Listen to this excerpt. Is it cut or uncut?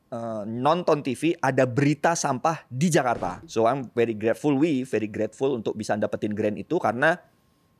cut